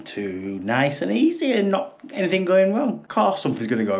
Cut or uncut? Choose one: cut